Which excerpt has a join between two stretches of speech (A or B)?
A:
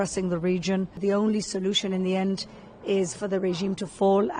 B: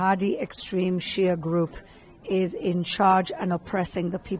A